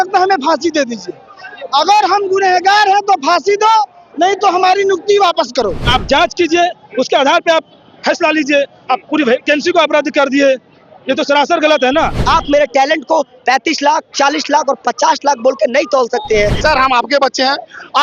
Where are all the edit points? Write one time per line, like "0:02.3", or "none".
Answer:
0:05.8
0:12.2
0:16.6

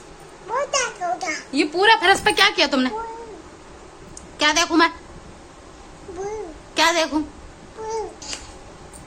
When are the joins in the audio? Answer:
0:08.2

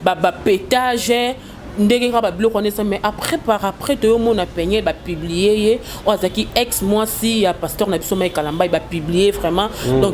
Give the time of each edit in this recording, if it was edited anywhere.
none

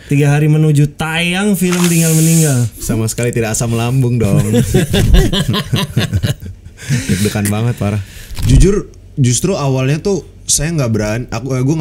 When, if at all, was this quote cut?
0:02.9
0:08.3

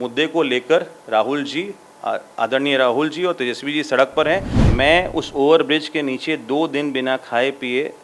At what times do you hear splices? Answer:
0:04.5

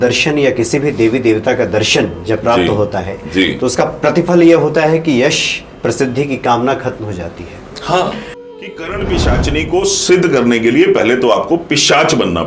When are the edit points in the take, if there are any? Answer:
0:08.4

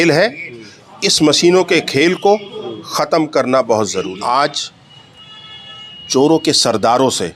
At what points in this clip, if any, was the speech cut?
0:04.2

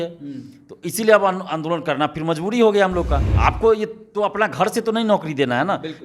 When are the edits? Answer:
0:03.2

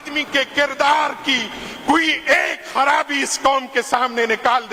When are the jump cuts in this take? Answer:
none

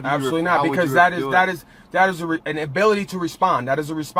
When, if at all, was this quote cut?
none

